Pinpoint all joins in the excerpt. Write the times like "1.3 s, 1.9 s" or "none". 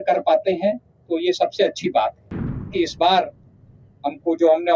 2.7 s